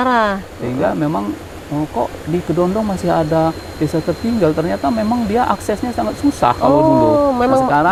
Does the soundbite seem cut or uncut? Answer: uncut